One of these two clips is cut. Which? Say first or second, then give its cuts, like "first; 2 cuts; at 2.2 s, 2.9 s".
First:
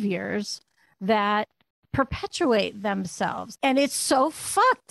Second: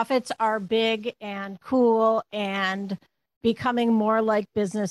first; 1 cut; at 3.4 s